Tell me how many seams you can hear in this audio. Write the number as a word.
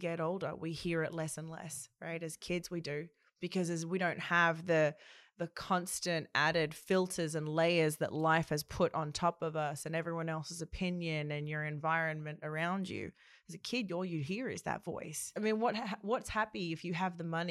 one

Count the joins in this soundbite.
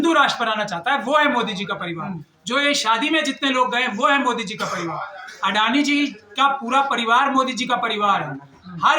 zero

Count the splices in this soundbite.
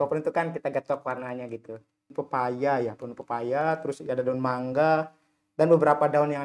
one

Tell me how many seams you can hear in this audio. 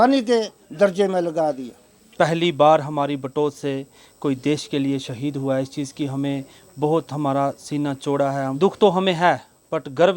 two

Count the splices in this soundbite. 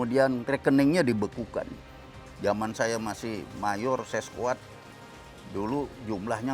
one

